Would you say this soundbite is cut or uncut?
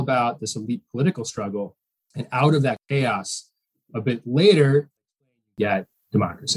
cut